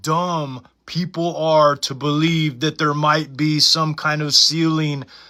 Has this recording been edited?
no; 0 cuts

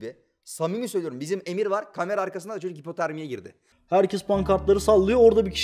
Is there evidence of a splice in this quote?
yes; 1 cut; at 3.7 s

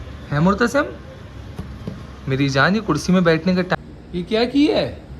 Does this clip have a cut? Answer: yes; 1 cut; at 3.7 s

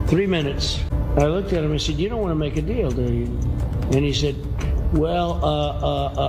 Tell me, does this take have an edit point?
yes; 1 cut; at 0.9 s

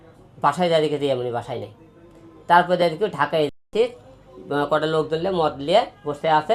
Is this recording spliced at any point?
no; 0 cuts

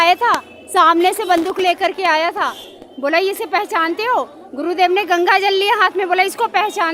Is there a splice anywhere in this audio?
no; 0 cuts

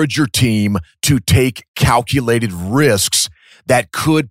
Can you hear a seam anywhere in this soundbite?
yes; 1 cut; at 0.9 s

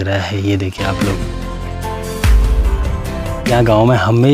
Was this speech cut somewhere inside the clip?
no; 0 cuts

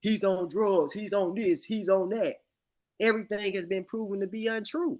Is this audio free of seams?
yes; 0 cuts

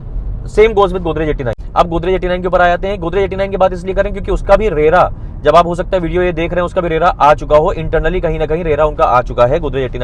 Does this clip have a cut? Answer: yes; 1 cut; at 1.5 s

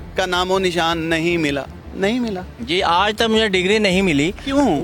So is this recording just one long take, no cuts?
yes; 0 cuts

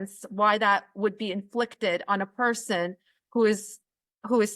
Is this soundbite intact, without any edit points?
yes; 0 cuts

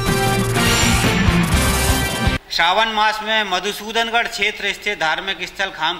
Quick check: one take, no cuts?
yes; 0 cuts

